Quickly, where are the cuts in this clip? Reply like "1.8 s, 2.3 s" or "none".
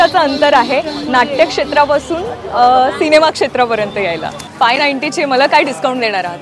4.5 s